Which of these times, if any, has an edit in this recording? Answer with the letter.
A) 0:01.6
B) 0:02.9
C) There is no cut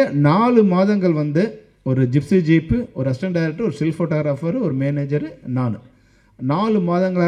C